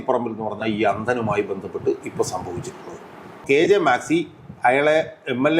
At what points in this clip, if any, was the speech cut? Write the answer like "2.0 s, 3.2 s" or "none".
3.4 s